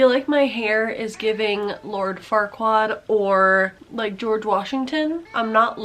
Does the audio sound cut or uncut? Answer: uncut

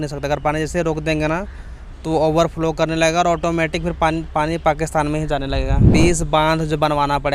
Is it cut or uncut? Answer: cut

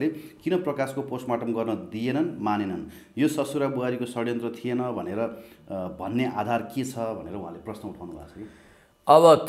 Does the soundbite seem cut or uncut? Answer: uncut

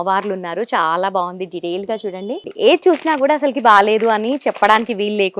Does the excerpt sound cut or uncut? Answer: cut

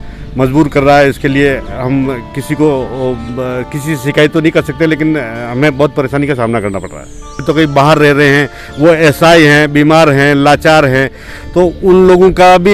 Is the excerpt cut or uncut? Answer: cut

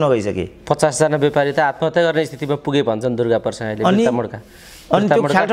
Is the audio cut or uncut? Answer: uncut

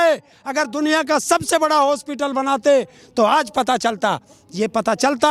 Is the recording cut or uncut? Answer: uncut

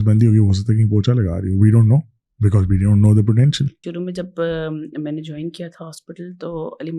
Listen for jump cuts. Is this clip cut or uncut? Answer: cut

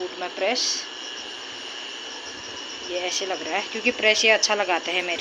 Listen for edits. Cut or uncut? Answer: uncut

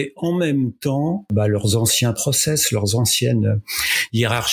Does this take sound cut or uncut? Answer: cut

